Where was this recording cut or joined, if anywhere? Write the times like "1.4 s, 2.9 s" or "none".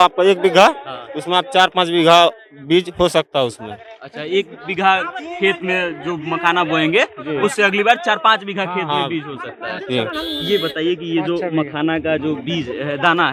none